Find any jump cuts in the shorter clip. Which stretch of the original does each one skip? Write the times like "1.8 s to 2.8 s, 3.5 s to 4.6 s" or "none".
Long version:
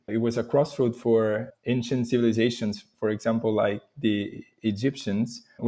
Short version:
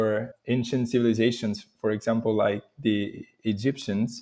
none